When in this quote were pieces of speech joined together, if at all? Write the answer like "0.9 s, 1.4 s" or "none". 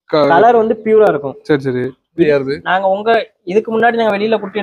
2.2 s